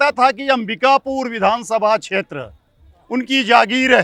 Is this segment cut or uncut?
uncut